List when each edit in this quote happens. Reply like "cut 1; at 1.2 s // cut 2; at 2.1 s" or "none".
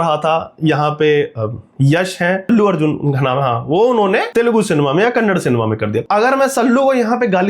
cut 1; at 2.5 s // cut 2; at 4.3 s // cut 3; at 6.0 s